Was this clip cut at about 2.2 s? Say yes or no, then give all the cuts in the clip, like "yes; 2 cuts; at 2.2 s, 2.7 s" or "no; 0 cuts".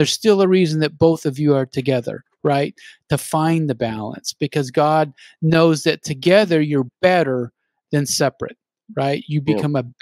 no; 0 cuts